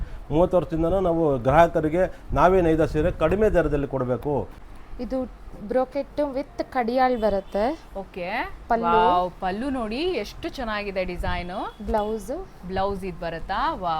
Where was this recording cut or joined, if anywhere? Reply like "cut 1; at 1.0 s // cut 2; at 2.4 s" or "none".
cut 1; at 4.6 s